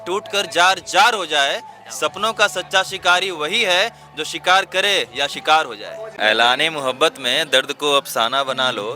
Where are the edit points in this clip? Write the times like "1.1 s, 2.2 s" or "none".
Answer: 6.1 s